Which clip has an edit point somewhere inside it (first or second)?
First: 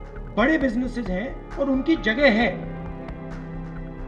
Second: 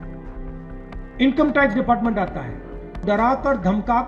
second